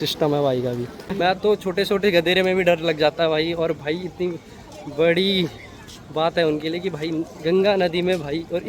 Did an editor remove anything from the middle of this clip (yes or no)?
no